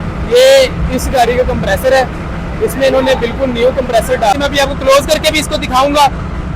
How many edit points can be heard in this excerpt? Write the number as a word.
one